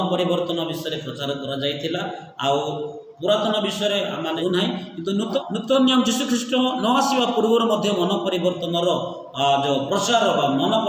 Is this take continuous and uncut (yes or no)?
no